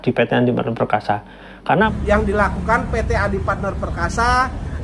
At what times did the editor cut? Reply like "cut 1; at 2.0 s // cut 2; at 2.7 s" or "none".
cut 1; at 1.9 s